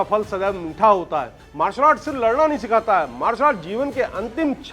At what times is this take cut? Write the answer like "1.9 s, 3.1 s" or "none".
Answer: 1.4 s